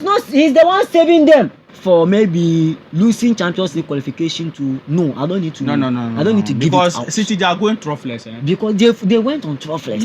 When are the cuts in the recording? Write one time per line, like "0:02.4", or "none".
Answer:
0:01.6

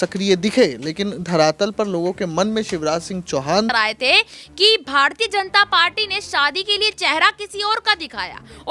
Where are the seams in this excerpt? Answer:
0:03.7

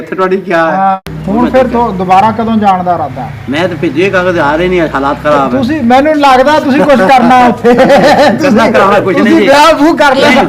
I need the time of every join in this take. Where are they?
0:01.0

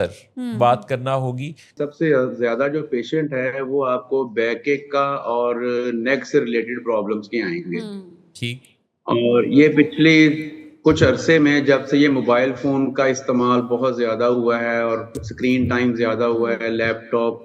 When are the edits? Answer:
0:01.7

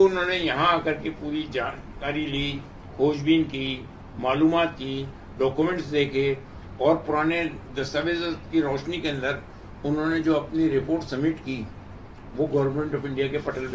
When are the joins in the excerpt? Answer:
none

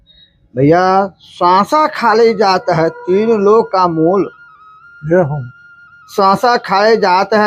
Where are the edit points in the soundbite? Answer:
none

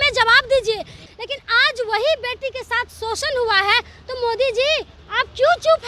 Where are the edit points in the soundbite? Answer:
0:01.0

